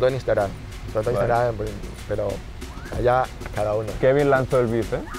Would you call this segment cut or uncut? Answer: cut